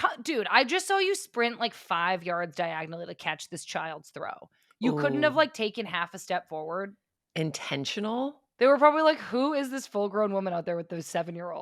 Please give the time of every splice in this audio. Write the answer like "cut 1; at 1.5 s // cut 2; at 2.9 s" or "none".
none